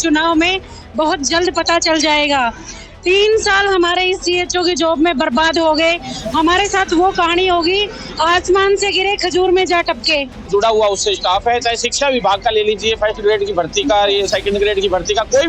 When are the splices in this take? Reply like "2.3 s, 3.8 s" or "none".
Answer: 10.5 s